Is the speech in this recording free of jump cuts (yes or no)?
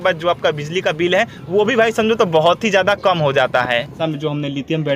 no